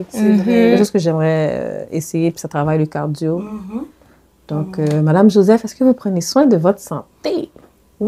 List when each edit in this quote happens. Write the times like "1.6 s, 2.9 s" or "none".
none